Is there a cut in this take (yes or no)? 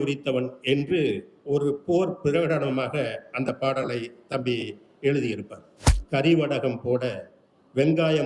yes